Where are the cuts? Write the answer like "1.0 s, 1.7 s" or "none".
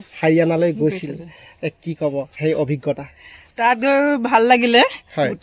none